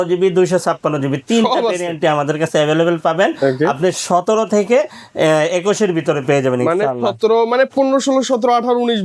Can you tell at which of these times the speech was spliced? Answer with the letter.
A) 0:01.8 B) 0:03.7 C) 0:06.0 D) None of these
D